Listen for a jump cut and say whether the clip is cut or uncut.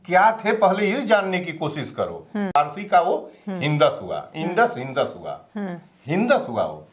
cut